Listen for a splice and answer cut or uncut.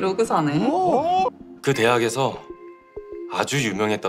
cut